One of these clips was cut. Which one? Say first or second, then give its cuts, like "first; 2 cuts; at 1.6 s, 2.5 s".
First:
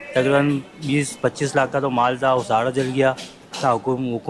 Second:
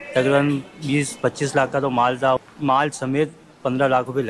second; 1 cut; at 2.4 s